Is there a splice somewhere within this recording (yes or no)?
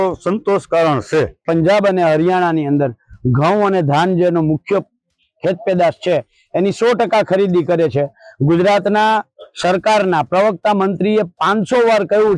yes